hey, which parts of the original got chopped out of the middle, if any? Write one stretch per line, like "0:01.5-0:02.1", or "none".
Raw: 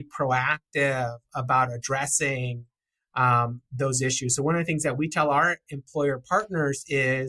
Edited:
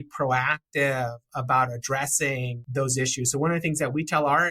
0:02.6-0:03.6